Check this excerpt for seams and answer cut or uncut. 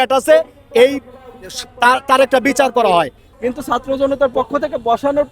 cut